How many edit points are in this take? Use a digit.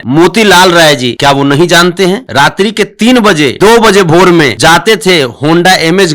4